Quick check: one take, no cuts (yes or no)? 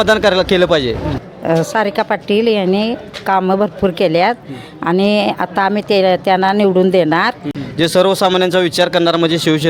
no